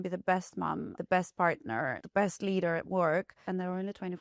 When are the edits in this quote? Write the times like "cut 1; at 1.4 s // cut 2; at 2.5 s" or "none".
cut 1; at 0.9 s // cut 2; at 2.0 s // cut 3; at 3.4 s